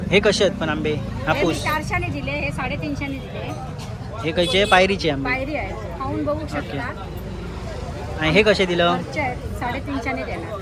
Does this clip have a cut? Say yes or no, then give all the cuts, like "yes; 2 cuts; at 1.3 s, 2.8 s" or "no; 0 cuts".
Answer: no; 0 cuts